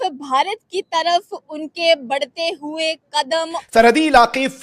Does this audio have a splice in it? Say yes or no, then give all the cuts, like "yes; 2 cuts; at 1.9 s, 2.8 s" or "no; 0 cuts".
yes; 1 cut; at 3.6 s